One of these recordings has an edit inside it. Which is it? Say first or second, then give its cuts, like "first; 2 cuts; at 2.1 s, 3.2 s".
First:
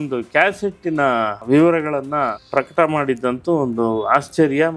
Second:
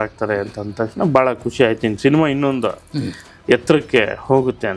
first; 2 cuts; at 1.4 s, 2.4 s